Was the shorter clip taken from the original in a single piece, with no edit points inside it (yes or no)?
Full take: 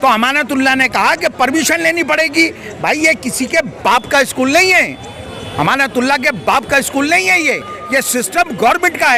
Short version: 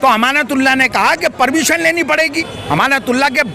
no